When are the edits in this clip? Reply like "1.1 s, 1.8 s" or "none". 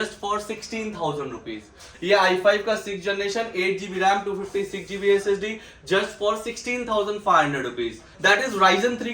1.9 s, 8.1 s